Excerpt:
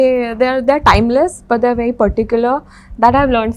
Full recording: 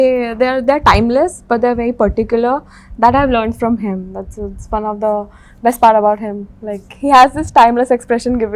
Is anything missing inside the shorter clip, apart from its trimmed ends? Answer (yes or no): no